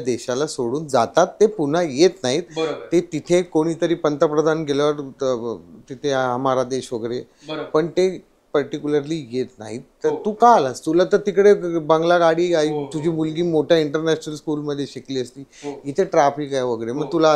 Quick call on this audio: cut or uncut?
uncut